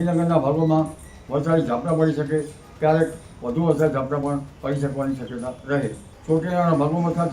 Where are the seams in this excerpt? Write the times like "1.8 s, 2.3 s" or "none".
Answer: 6.1 s